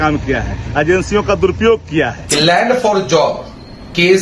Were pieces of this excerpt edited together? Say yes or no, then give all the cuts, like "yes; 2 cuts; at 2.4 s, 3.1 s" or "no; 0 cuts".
yes; 1 cut; at 2.2 s